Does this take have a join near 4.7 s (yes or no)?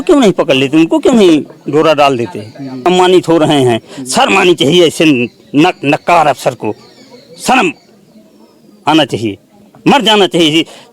no